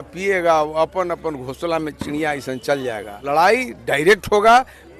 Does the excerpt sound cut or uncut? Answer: cut